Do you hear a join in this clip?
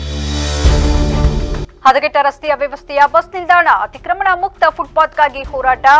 no; 0 cuts

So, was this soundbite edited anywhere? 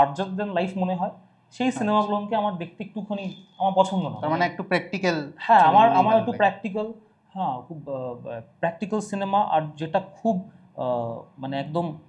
no; 0 cuts

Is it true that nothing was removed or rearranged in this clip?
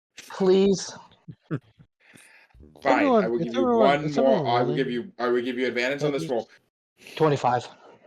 no; 1 cut; at 6.6 s

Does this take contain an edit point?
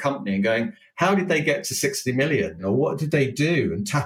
yes; 1 cut; at 2.6 s

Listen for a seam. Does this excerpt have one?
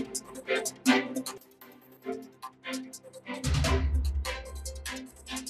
yes; 1 cut; at 1.2 s

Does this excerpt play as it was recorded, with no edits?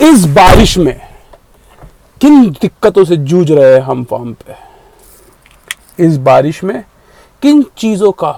yes; 0 cuts

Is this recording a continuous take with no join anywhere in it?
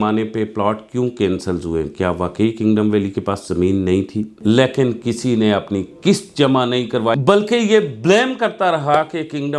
no; 2 cuts; at 4.3 s, 7.1 s

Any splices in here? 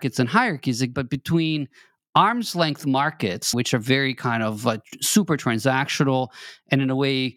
yes; 2 cuts; at 0.9 s, 3.5 s

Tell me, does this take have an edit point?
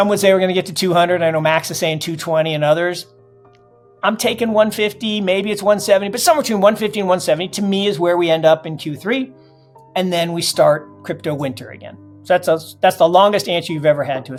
no; 0 cuts

